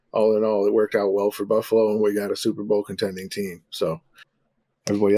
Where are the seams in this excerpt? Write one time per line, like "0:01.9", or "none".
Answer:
none